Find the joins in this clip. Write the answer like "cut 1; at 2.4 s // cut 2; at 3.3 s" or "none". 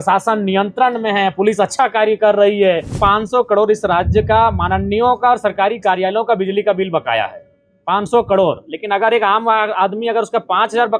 cut 1; at 2.9 s